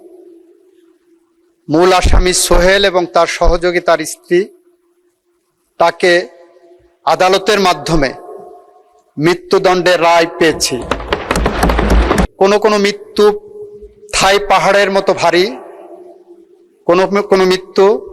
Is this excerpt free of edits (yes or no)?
no